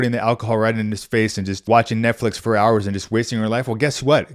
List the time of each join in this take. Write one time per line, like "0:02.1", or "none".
0:01.7